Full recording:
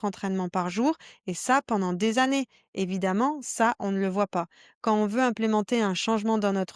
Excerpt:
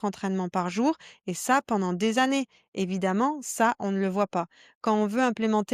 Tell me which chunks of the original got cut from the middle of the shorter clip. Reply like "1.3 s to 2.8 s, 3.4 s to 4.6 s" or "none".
none